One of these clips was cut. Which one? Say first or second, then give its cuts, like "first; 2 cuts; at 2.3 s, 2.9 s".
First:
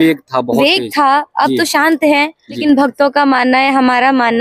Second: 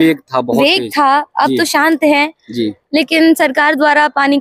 first; 1 cut; at 2.6 s